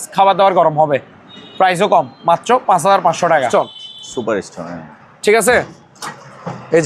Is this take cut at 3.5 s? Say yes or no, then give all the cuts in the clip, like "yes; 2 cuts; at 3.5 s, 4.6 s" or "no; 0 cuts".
yes; 1 cut; at 3.5 s